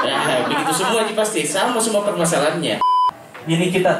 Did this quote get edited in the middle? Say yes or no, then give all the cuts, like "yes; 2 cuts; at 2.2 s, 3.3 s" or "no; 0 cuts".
yes; 1 cut; at 3.1 s